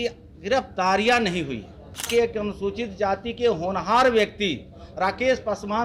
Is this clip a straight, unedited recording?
no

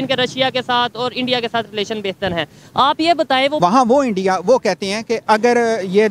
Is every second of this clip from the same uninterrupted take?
no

